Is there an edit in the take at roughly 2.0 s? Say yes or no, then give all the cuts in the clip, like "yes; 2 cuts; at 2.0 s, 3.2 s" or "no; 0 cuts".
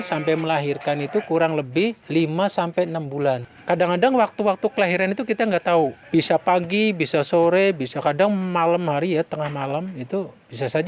yes; 3 cuts; at 2.0 s, 3.5 s, 6.0 s